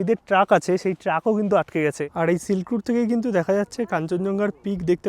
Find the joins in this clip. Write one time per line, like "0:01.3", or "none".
0:02.1